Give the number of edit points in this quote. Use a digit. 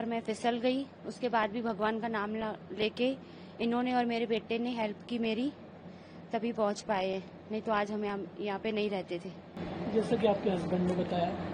0